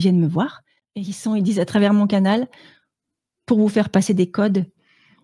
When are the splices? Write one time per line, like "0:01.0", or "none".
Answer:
0:01.1